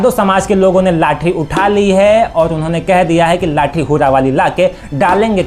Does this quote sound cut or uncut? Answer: uncut